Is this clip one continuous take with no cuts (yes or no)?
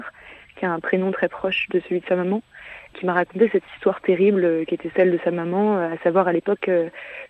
no